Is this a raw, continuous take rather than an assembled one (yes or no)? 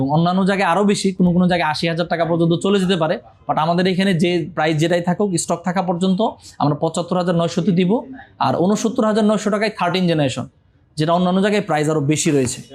yes